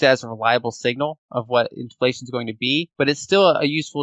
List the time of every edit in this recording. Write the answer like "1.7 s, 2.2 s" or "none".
2.9 s